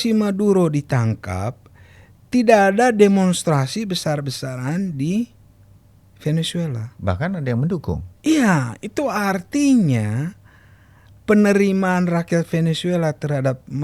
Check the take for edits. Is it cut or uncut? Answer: uncut